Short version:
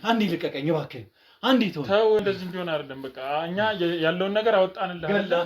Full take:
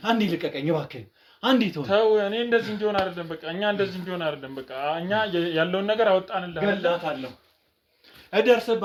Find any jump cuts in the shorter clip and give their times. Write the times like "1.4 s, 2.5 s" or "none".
2.2 s

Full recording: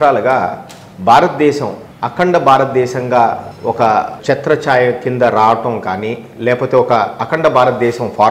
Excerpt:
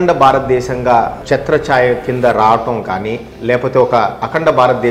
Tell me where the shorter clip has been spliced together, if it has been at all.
1.2 s

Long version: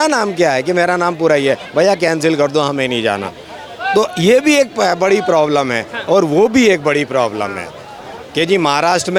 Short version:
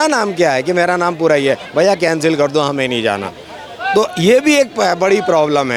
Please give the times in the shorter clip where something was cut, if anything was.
none

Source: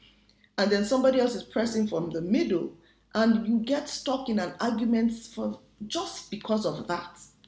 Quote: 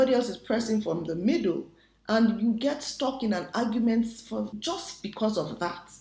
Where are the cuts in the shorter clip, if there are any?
4.6 s

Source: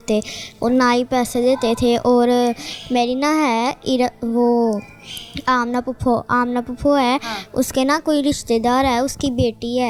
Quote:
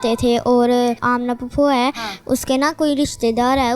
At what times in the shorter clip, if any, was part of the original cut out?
1.0 s

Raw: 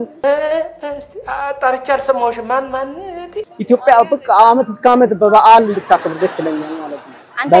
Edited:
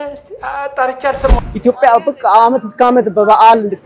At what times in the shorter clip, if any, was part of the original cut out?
1.4 s

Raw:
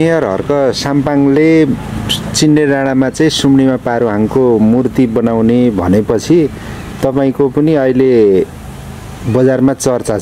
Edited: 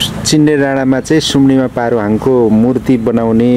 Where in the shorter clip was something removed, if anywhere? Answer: none

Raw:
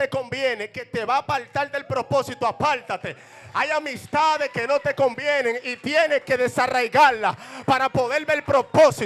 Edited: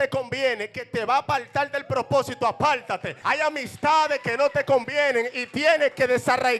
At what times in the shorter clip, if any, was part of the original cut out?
3.1 s

